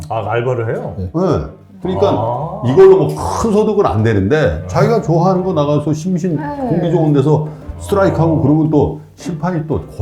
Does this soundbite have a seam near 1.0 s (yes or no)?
no